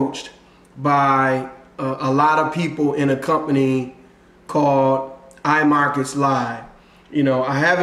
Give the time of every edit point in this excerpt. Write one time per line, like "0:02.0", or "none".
none